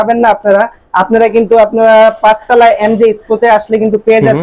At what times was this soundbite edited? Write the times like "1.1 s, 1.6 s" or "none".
none